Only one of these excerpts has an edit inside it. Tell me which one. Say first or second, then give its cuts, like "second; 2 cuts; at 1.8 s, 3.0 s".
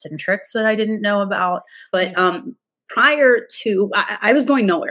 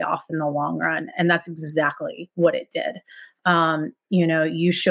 first; 1 cut; at 1.7 s